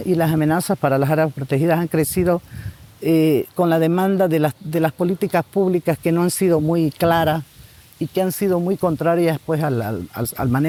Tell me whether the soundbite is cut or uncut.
uncut